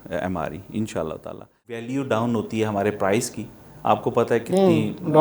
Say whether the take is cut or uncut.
cut